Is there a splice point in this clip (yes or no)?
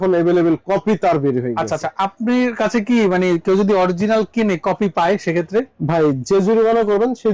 no